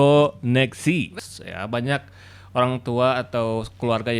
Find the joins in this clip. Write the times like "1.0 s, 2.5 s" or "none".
1.2 s